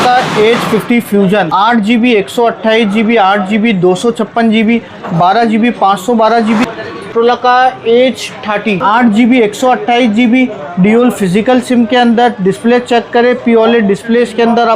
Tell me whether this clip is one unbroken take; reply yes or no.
no